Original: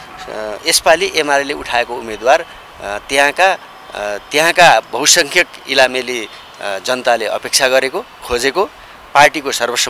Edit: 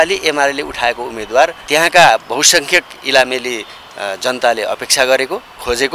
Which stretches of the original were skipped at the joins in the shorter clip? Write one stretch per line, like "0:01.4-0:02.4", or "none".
0:02.5-0:04.2